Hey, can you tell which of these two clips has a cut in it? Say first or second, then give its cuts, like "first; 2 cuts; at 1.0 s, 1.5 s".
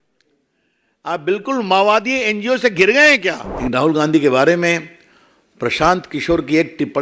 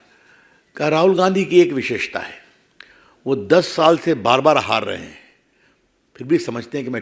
first; 1 cut; at 3.5 s